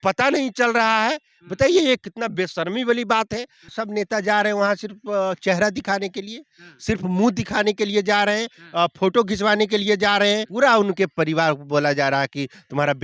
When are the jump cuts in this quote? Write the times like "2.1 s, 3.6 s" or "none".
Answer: 3.7 s, 10.5 s